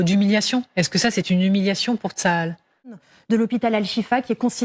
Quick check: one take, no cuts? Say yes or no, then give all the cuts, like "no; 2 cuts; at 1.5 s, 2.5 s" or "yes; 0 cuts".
no; 1 cut; at 3.1 s